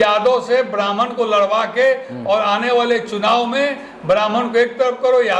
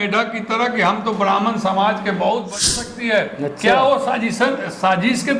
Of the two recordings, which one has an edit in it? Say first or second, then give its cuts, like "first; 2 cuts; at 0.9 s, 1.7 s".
second; 1 cut; at 2.8 s